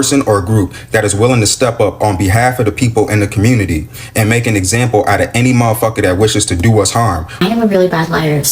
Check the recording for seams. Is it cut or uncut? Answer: cut